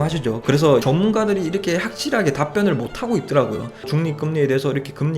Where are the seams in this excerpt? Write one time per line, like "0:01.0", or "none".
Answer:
0:03.9